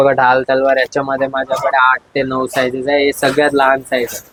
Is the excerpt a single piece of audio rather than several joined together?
yes; 0 cuts

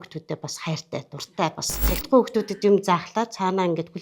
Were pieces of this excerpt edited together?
yes; 1 cut; at 1.7 s

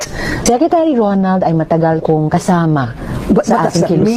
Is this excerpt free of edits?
yes; 0 cuts

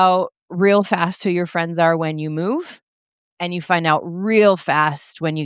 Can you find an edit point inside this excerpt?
no; 0 cuts

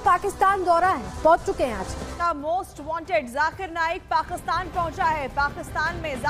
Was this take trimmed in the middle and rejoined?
yes; 1 cut; at 2.2 s

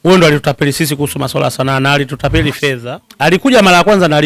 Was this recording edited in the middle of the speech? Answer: yes; 1 cut; at 2.8 s

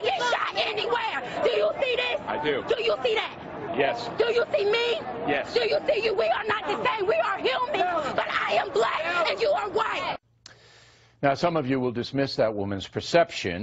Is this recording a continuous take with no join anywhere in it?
no; 1 cut; at 12.0 s

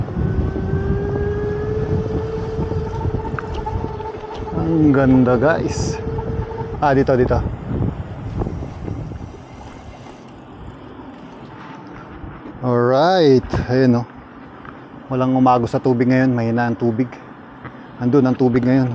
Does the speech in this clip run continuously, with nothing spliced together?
no; 1 cut; at 11.5 s

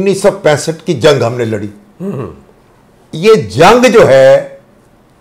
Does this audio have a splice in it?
no; 0 cuts

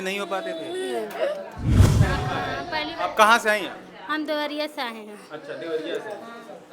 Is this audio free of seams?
no; 1 cut; at 2.0 s

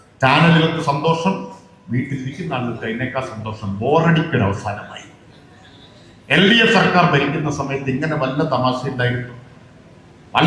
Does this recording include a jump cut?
no; 0 cuts

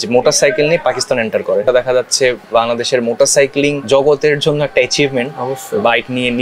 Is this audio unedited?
yes; 0 cuts

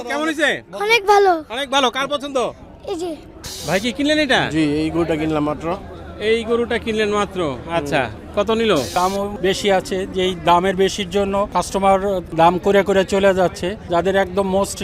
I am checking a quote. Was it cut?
yes; 5 cuts; at 3.4 s, 9.0 s, 11.5 s, 12.3 s, 13.7 s

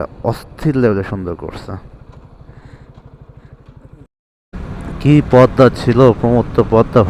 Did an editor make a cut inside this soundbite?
yes; 1 cut; at 4.5 s

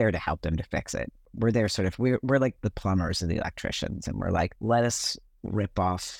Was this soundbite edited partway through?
yes; 3 cuts; at 1.2 s, 2.6 s, 4.6 s

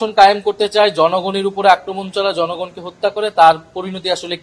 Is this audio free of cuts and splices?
yes; 0 cuts

